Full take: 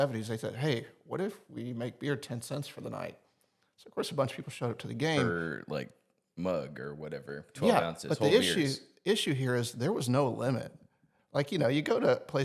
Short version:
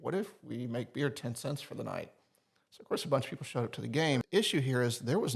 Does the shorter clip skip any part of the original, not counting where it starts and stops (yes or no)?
yes